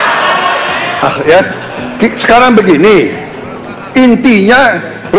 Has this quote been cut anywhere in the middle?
yes; 1 cut; at 1.1 s

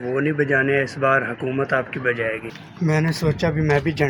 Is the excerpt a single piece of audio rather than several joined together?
no; 1 cut; at 2.5 s

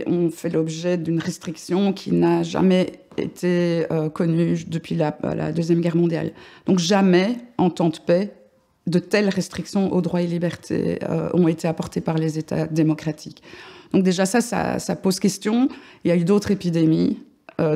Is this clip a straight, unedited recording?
no; 1 cut; at 1.0 s

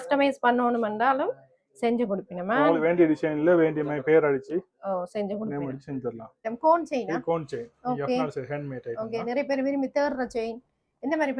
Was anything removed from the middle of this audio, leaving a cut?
yes; 1 cut; at 6.4 s

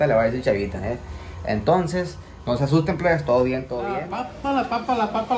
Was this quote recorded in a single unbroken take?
no; 1 cut; at 3.8 s

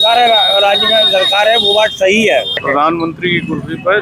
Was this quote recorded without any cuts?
no; 1 cut; at 2.6 s

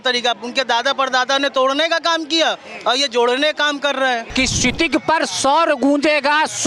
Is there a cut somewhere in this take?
yes; 1 cut; at 4.3 s

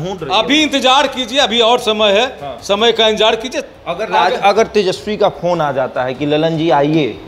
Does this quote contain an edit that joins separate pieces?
no; 0 cuts

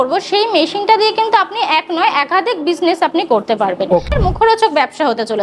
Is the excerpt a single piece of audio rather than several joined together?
no; 1 cut; at 4.1 s

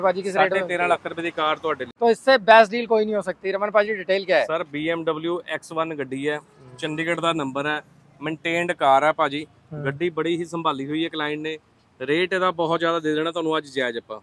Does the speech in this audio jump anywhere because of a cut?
yes; 1 cut; at 1.9 s

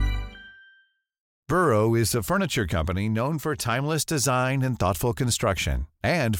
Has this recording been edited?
yes; 1 cut; at 1.4 s

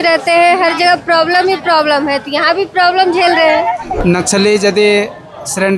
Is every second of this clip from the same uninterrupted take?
no; 1 cut; at 3.9 s

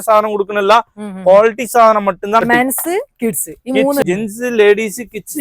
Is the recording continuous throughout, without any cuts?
no; 2 cuts; at 2.4 s, 4.1 s

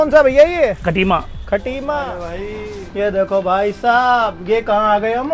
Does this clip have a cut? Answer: yes; 1 cut; at 2.0 s

